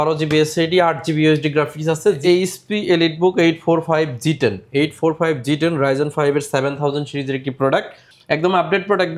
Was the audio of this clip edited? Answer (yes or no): yes